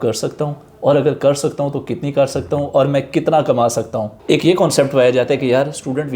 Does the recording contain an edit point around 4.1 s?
yes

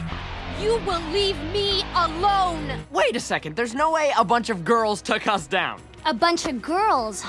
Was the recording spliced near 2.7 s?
yes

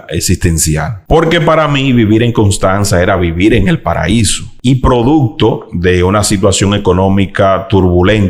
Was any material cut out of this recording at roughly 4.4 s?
yes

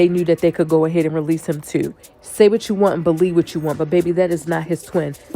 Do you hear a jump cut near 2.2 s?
yes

